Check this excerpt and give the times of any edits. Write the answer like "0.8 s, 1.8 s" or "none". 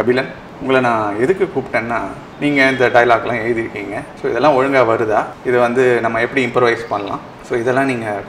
5.3 s